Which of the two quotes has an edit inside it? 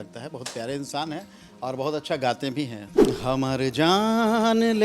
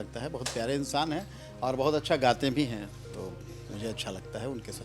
first; 1 cut; at 2.9 s

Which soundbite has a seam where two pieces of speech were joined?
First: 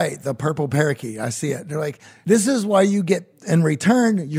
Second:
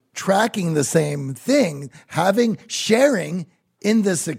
first; 1 cut; at 2.1 s

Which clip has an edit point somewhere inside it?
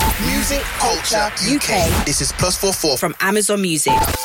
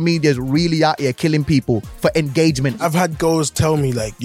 second; 1 cut; at 2.8 s

